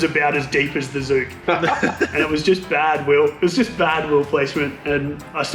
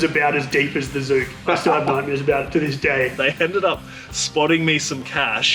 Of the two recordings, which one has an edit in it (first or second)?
second